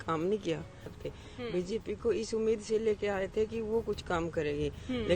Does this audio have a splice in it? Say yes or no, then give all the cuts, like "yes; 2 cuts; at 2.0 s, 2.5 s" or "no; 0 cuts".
yes; 1 cut; at 1.0 s